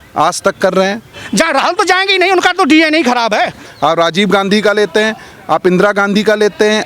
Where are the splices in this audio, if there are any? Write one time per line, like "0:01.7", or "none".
0:01.2
0:03.6